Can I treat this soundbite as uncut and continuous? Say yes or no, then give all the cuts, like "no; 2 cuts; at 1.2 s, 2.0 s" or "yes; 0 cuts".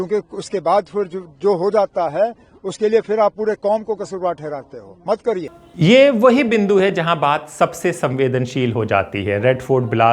yes; 0 cuts